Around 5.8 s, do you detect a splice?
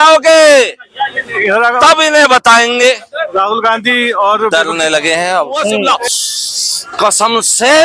yes; 1 cut; at 5.8 s

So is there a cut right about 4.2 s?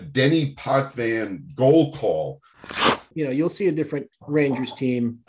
no; 1 cut; at 2.6 s

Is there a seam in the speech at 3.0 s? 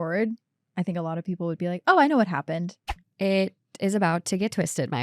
yes; 1 cut; at 3.0 s

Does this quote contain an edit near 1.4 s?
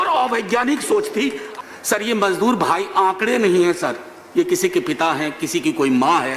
yes; 1 cut; at 1.4 s

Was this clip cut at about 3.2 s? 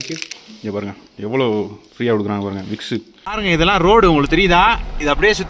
yes; 1 cut; at 3.2 s

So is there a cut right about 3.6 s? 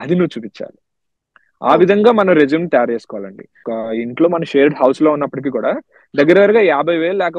yes; 1 cut; at 3.6 s

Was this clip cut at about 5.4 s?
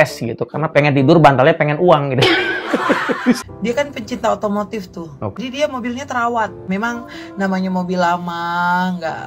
yes; 3 cuts; at 3.4 s, 5.4 s, 6.7 s

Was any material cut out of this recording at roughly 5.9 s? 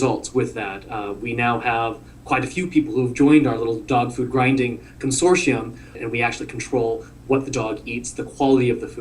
yes; 1 cut; at 5.9 s

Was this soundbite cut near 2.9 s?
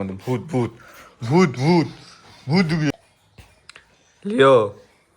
yes; 1 cut; at 2.9 s

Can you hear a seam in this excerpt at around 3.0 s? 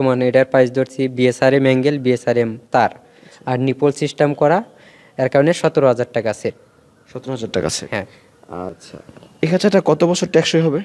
no; 1 cut; at 8.8 s

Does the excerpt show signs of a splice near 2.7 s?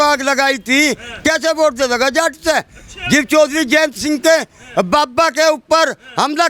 no; 0 cuts

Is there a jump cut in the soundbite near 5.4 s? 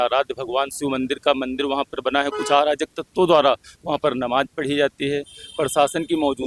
no; 0 cuts

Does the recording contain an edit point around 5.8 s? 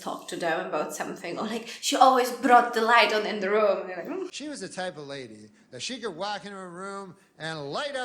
no; 1 cut; at 4.4 s

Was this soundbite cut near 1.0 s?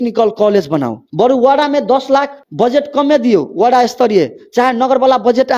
yes; 2 cuts; at 1.0 s, 2.4 s

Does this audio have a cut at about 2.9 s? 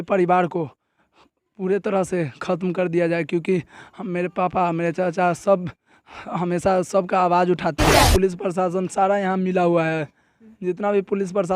no; 1 cut; at 8.0 s

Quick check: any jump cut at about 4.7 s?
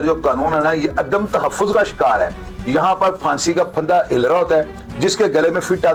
no; 0 cuts

